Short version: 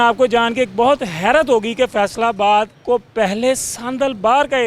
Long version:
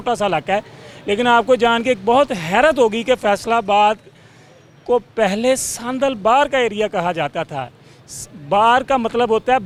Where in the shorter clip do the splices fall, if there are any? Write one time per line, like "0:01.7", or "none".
0:02.8